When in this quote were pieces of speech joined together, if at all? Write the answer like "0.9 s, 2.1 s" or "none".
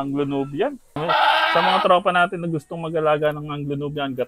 1.0 s